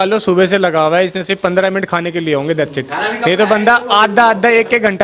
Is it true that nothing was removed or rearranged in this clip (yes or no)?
yes